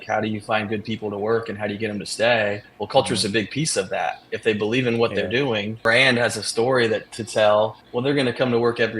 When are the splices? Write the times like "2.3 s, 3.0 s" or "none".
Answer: 5.8 s, 7.8 s